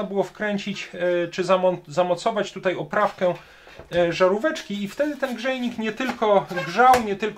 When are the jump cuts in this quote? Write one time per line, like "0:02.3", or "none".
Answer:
none

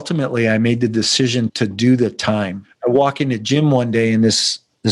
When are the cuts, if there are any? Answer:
0:02.8

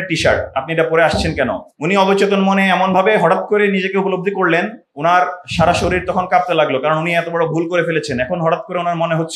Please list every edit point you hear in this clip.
0:01.7

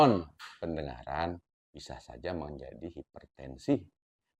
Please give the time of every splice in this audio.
none

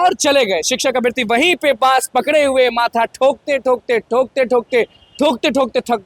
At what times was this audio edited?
none

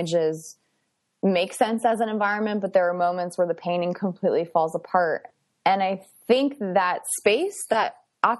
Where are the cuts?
none

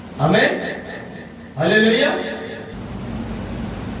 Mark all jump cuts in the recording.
0:02.7

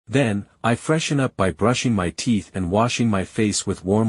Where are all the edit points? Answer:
0:02.5

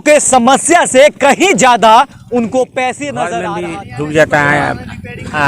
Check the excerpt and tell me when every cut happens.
0:03.3

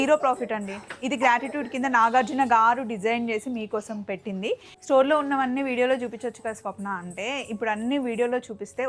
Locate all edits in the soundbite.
0:04.7

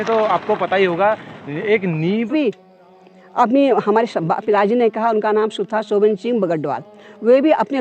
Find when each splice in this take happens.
0:02.3

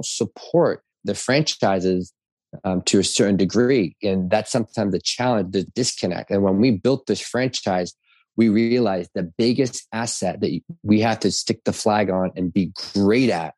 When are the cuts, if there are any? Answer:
0:01.0
0:05.7

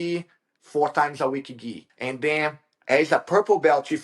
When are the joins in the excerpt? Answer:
0:01.9

